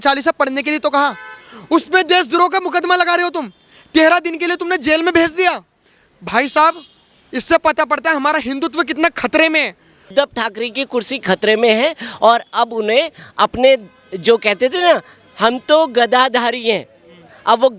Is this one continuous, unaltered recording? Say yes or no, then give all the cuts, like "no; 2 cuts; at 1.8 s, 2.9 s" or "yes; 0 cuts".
no; 1 cut; at 10.1 s